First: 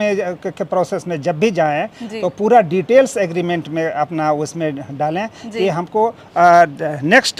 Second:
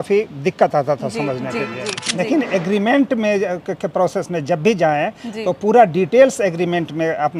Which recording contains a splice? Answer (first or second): second